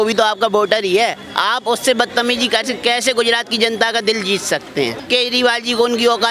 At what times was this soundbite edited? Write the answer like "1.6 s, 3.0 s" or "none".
5.0 s

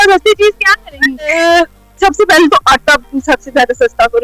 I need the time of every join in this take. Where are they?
1.3 s

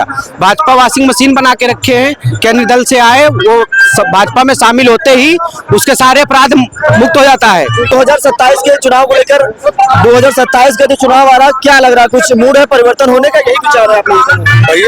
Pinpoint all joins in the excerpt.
none

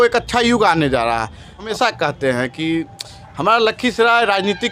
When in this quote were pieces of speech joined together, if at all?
1.7 s

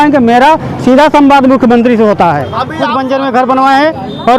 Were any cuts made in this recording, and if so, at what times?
2.8 s

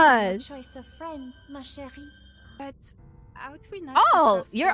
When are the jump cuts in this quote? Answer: 2.6 s

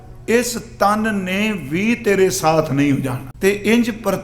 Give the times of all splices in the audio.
3.2 s

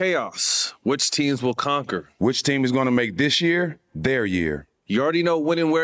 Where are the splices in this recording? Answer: 2.1 s

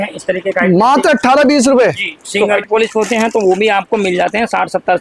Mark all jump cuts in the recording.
2.6 s

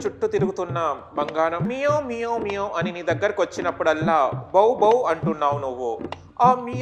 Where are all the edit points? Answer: 1.7 s

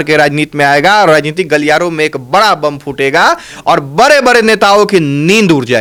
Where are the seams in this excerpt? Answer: none

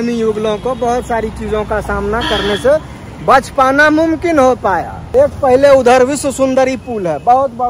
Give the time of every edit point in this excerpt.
4.9 s

